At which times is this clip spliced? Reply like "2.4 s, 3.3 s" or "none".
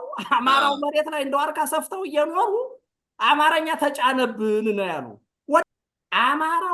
5.6 s

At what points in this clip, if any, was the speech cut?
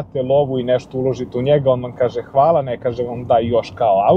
none

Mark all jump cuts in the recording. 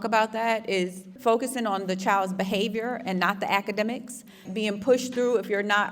1.1 s, 4.5 s

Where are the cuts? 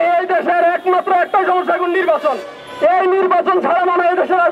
none

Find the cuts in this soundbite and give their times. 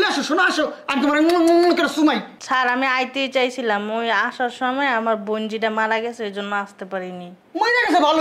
2.3 s

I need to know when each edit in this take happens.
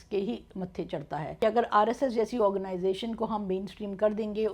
1.2 s

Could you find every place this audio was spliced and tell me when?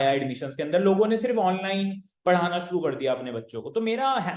none

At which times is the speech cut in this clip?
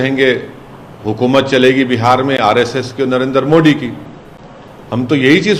none

